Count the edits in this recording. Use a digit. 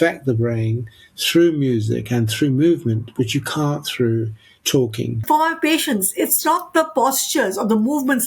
1